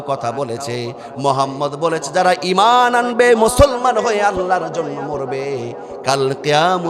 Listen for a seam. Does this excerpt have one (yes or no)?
no